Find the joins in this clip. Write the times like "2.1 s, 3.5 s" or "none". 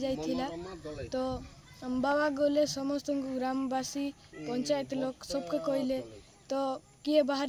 none